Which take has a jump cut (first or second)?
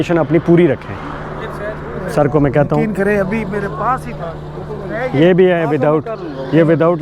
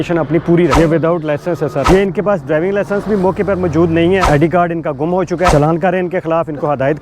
second